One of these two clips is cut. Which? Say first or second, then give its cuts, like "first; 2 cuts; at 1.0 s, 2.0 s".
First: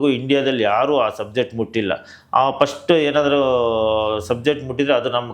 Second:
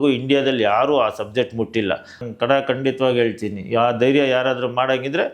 second; 1 cut; at 2.2 s